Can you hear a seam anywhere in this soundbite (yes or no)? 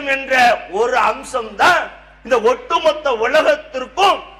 no